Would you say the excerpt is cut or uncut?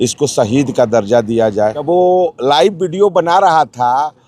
cut